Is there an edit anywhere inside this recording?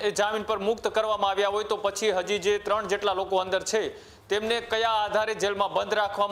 no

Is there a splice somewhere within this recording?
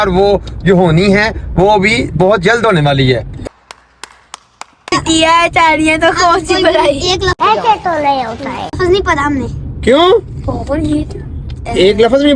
yes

